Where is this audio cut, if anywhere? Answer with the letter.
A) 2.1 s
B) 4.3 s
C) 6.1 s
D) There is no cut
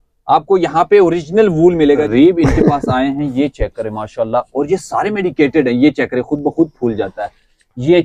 A